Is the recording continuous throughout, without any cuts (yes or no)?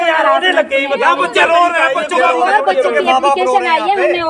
yes